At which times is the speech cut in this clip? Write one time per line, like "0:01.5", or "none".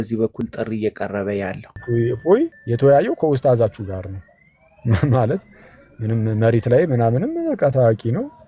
0:01.7
0:02.6